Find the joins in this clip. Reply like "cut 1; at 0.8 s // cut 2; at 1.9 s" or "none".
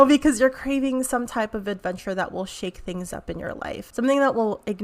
cut 1; at 3.9 s